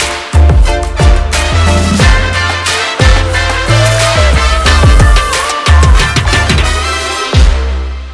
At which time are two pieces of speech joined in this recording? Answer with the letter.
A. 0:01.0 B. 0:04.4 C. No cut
C